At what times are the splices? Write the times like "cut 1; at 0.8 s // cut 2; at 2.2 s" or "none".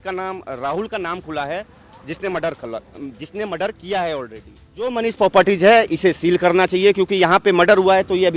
cut 1; at 4.9 s

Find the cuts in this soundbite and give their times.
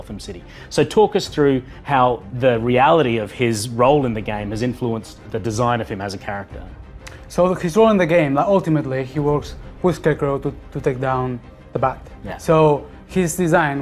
none

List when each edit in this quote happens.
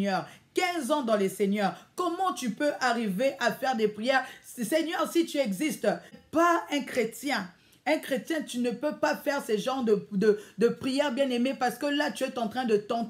cut 1; at 6.1 s

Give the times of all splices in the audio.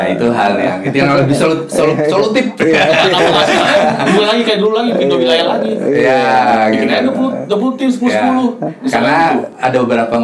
none

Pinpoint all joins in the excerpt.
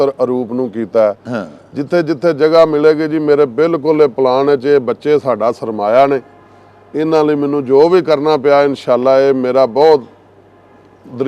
none

